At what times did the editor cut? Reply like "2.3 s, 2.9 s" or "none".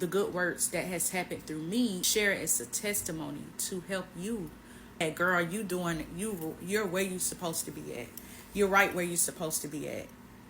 2.0 s, 5.0 s